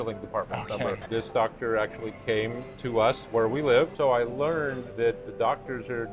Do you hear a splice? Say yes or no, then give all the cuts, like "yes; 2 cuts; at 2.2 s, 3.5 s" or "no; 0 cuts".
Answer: yes; 4 cuts; at 1.0 s, 3.2 s, 3.9 s, 4.8 s